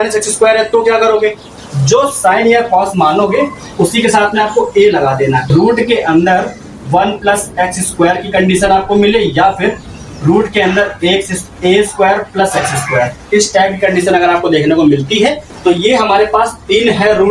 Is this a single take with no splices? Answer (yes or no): no